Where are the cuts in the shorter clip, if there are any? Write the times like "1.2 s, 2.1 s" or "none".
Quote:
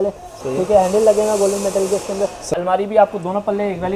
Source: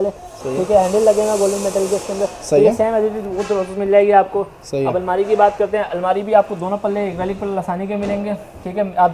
2.5 s